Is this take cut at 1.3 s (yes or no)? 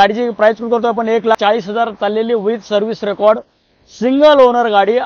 yes